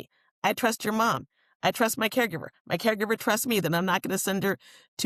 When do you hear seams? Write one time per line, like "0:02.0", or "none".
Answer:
none